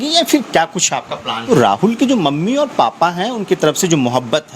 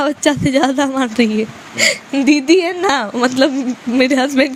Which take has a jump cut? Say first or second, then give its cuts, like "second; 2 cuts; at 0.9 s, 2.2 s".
first; 1 cut; at 1.5 s